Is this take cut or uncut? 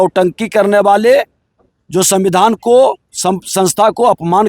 uncut